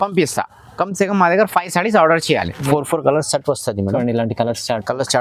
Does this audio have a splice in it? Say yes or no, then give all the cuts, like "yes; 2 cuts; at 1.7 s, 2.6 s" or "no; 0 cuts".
yes; 1 cut; at 2.7 s